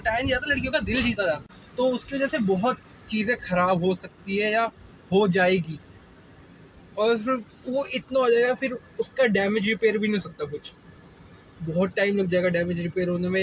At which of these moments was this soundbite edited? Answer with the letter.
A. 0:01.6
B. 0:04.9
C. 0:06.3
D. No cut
A